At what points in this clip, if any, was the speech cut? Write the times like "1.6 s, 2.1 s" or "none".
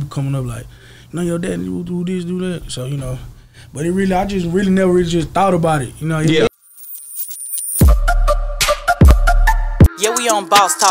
6.5 s